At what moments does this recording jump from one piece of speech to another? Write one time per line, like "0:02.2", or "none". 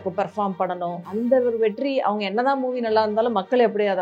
0:01.0